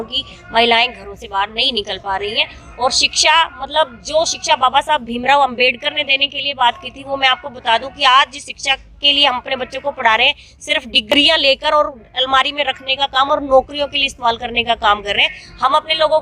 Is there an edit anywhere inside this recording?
no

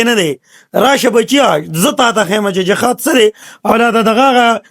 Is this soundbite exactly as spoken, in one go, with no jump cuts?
no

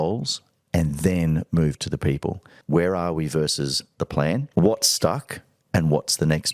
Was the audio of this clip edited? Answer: yes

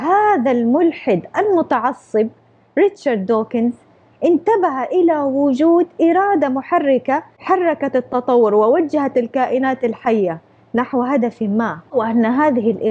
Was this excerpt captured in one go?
no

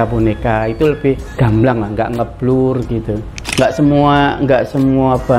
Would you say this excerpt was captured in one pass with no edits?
no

